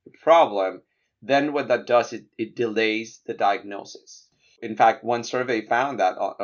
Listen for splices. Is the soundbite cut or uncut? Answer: cut